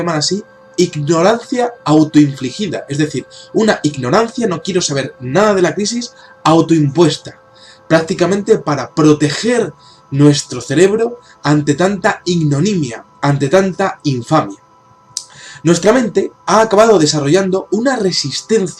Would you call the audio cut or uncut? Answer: cut